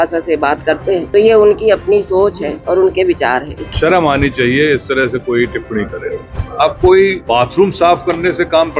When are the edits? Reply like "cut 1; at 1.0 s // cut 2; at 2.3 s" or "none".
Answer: cut 1; at 1.1 s // cut 2; at 3.6 s // cut 3; at 6.4 s // cut 4; at 7.2 s